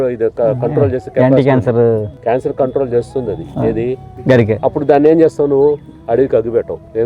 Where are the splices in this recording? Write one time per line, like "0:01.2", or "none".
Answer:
0:02.1
0:04.1
0:05.9